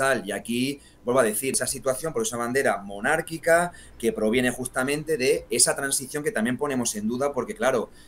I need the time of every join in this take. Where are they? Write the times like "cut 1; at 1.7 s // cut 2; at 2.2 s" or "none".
cut 1; at 1.5 s